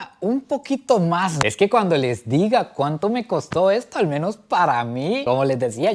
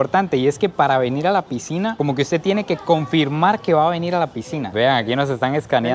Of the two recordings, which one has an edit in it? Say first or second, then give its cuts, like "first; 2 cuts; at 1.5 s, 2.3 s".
first; 1 cut; at 1.4 s